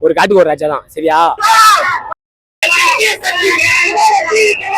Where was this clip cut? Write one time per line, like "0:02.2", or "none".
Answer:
0:01.4